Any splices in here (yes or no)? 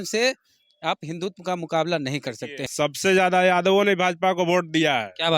yes